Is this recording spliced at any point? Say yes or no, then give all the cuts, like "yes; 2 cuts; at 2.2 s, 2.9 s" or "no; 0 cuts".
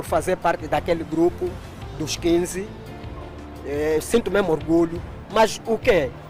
no; 0 cuts